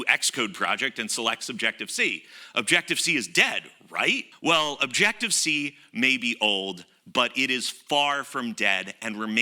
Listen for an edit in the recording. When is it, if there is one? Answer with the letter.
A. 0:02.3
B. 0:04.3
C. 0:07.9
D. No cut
B